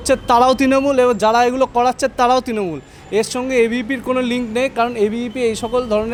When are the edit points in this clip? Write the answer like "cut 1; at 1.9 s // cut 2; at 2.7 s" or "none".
none